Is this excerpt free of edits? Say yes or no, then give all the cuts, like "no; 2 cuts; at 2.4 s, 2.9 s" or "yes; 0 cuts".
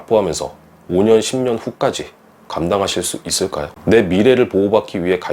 no; 1 cut; at 3.7 s